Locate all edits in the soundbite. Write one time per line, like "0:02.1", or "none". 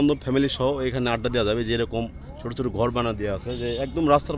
none